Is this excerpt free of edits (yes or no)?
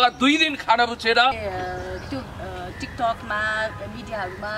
no